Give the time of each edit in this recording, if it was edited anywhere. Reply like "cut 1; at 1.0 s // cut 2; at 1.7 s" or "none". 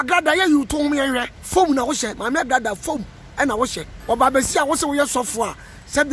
cut 1; at 1.3 s // cut 2; at 3.9 s